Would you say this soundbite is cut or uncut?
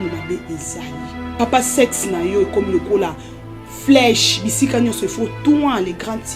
cut